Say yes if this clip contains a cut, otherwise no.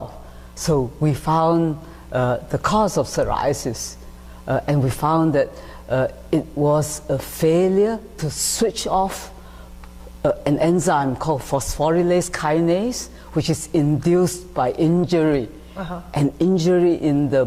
no